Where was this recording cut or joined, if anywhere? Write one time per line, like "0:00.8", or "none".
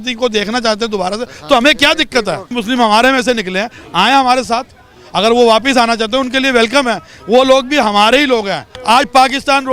0:02.5
0:08.7